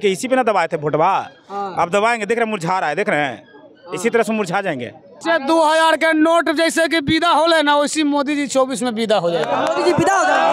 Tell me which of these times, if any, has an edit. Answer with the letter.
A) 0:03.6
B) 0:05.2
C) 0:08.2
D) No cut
B